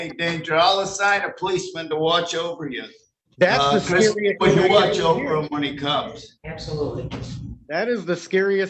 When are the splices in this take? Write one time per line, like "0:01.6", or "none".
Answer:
none